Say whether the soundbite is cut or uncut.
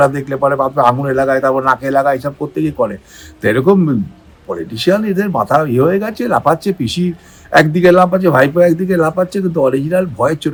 uncut